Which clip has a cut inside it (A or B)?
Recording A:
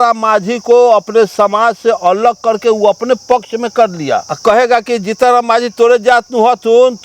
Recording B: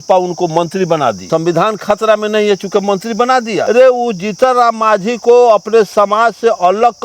B